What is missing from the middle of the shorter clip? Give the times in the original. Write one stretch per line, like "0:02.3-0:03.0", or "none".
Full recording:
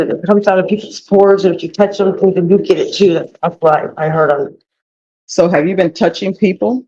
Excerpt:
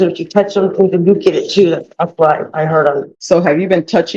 0:04.6-0:05.2